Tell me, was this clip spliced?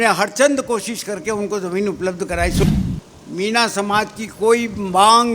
yes; 1 cut; at 2.6 s

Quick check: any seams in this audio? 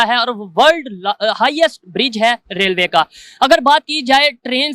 no; 0 cuts

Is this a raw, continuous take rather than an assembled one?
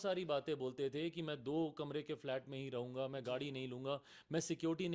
yes; 0 cuts

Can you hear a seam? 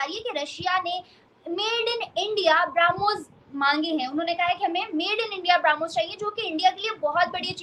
no; 0 cuts

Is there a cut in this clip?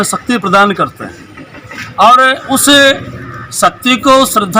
no; 0 cuts

